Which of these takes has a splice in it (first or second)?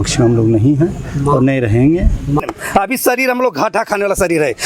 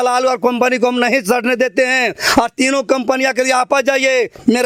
first